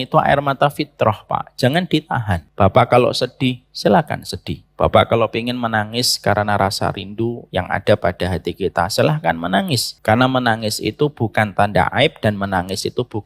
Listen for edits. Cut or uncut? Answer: cut